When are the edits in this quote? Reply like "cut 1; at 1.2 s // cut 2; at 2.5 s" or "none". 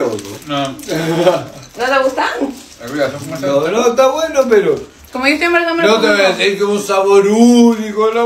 none